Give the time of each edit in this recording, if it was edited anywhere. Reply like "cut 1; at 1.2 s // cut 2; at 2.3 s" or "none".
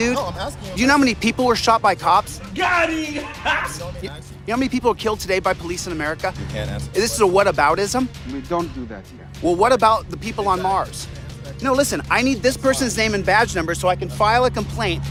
none